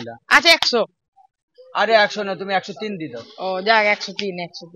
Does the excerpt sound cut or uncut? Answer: uncut